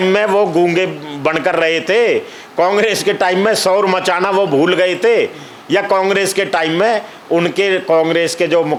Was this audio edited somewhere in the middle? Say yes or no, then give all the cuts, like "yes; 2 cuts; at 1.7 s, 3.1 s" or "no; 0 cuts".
no; 0 cuts